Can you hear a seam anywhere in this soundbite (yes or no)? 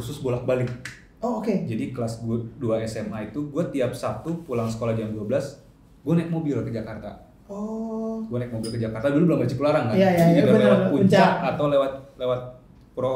no